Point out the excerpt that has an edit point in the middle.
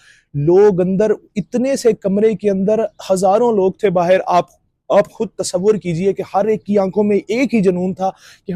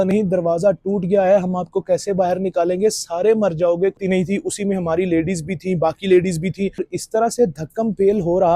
second; 2 cuts; at 4.0 s, 7.0 s

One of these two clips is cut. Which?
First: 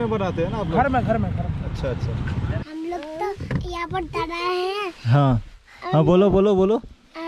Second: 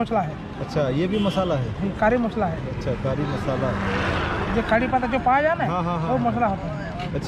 first; 1 cut; at 2.6 s

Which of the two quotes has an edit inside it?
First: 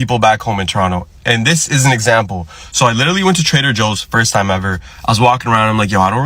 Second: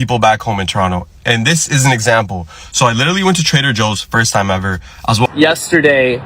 second; 1 cut; at 5.3 s

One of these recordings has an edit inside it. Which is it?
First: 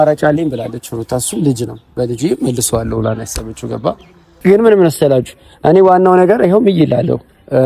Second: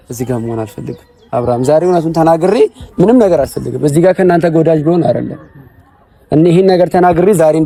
first; 1 cut; at 4.3 s

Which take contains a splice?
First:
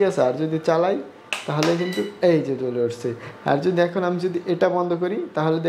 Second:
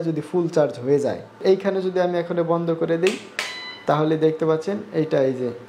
second; 1 cut; at 1.4 s

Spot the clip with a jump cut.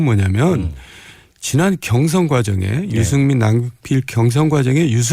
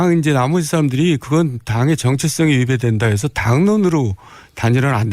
second; 1 cut; at 2.5 s

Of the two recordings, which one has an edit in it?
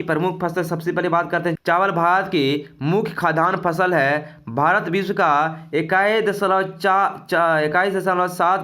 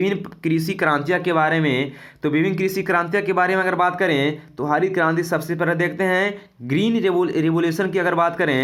first; 1 cut; at 1.6 s

